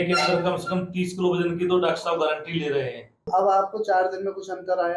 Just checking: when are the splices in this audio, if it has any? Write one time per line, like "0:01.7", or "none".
0:03.3